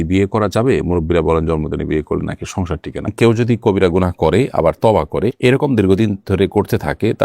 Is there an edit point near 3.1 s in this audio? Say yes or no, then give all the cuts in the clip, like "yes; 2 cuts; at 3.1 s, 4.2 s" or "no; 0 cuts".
yes; 1 cut; at 3.1 s